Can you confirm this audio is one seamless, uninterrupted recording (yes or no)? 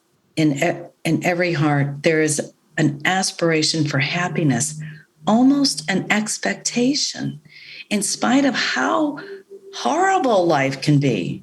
yes